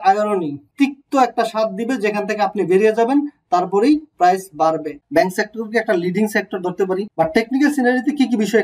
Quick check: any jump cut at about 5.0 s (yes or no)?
yes